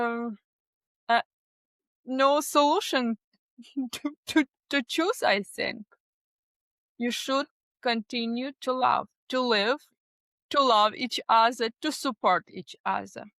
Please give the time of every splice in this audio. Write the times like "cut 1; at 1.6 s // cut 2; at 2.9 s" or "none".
cut 1; at 9.2 s